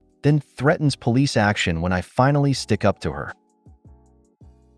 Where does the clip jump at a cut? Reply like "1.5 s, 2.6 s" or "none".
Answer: 3.8 s

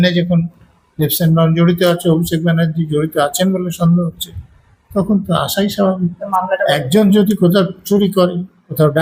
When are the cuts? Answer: none

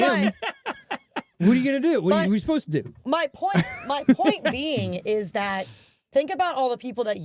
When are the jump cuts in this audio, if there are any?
none

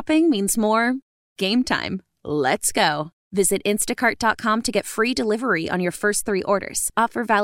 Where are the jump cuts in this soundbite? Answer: none

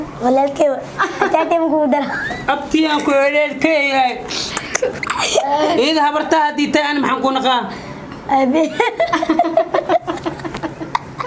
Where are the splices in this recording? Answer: none

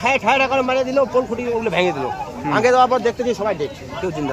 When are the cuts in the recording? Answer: none

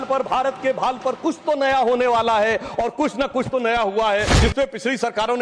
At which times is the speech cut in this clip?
4.3 s

